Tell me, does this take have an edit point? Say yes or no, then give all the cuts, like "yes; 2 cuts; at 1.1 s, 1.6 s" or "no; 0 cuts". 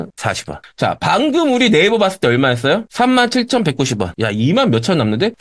yes; 1 cut; at 4.1 s